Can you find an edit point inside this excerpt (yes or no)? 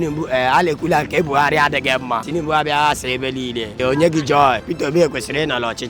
yes